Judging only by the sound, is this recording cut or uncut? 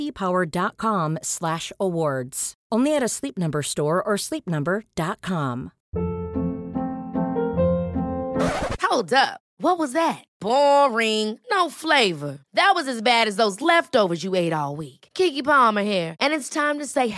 cut